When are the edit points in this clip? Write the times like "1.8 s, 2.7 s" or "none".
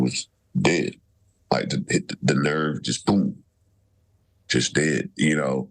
none